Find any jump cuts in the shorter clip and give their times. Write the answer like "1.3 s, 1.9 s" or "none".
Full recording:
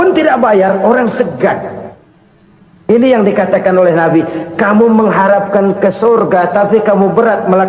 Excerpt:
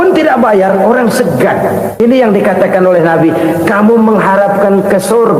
1.9 s